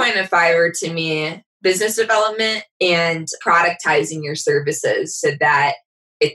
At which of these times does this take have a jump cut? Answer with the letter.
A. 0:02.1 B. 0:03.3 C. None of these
B